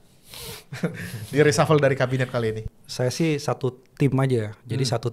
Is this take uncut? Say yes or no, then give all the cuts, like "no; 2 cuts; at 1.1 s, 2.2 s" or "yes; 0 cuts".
no; 1 cut; at 2.6 s